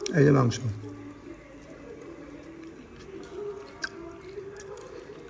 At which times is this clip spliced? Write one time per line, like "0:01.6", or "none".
none